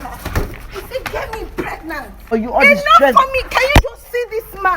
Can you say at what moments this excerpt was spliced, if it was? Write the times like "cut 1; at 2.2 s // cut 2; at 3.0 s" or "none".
cut 1; at 2.2 s